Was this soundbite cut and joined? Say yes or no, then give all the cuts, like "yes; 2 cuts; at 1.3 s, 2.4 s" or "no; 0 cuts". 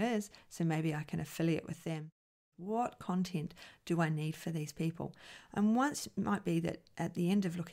yes; 1 cut; at 2.3 s